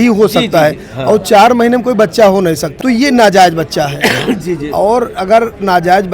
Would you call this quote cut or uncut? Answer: cut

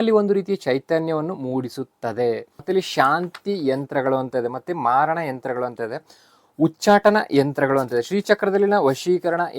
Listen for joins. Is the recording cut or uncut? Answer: cut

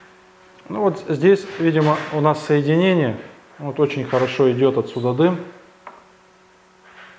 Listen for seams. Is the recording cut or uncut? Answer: uncut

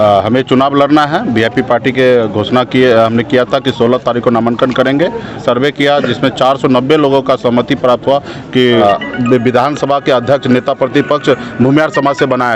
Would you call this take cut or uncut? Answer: cut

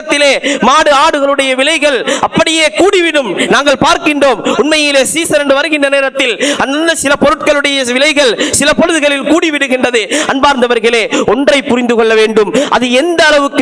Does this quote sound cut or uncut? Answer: uncut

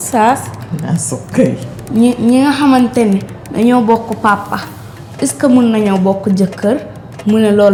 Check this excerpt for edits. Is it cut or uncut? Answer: uncut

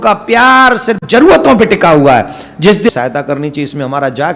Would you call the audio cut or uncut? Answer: cut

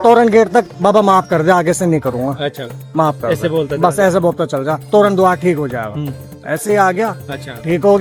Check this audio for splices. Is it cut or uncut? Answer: uncut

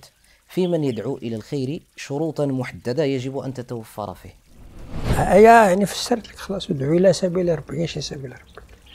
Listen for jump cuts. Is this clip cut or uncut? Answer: cut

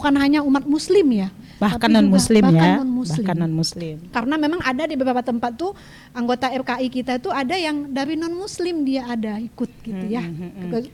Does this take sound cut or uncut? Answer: uncut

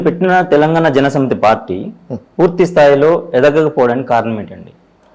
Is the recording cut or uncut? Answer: uncut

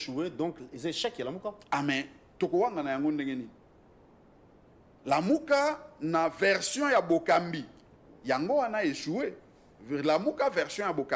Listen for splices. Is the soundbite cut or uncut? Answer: uncut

